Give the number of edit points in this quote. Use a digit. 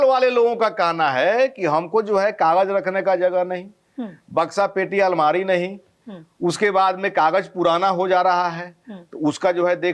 0